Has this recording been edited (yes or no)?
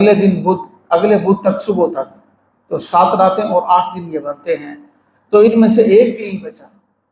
no